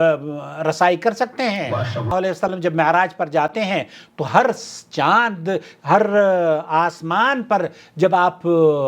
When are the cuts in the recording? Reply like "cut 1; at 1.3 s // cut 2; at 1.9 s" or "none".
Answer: cut 1; at 2.1 s